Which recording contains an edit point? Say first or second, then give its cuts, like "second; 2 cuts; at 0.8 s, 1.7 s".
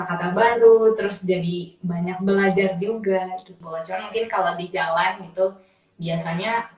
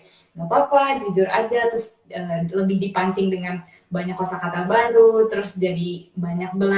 first; 1 cut; at 3.6 s